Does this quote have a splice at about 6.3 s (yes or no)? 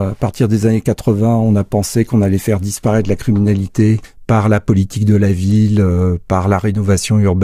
no